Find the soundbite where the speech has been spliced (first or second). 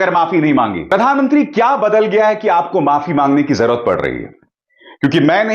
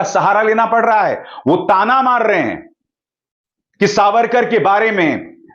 first